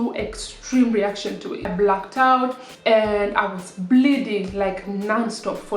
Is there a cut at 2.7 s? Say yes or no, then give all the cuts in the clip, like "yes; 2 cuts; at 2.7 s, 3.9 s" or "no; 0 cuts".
yes; 2 cuts; at 1.7 s, 2.7 s